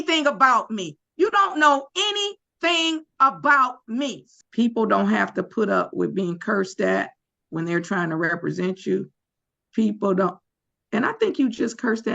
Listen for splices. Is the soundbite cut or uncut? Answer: cut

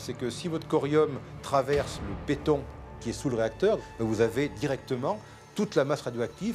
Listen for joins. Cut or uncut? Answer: cut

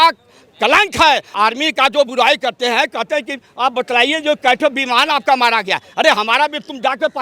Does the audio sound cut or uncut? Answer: cut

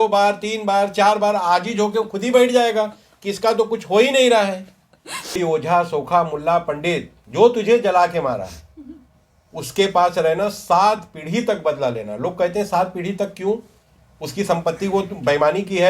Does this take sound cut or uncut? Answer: cut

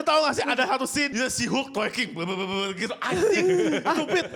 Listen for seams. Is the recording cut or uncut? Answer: uncut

